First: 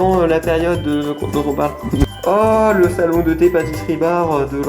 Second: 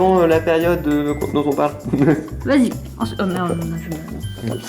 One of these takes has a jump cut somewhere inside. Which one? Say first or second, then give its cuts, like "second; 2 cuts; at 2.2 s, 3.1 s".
first; 1 cut; at 2.1 s